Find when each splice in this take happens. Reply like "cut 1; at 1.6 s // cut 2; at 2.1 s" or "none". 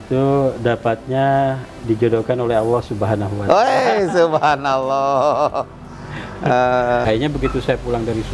cut 1; at 7.0 s